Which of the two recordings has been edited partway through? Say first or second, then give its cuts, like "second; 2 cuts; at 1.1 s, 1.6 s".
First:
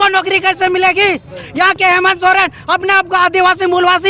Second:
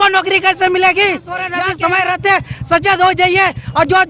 second; 1 cut; at 1.5 s